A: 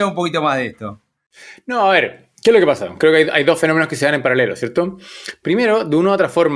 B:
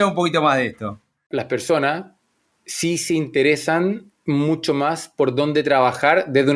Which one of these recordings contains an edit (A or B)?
B